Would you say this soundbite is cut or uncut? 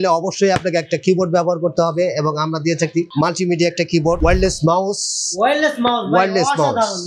cut